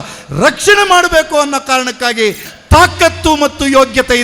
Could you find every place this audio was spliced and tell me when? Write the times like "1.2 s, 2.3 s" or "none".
2.4 s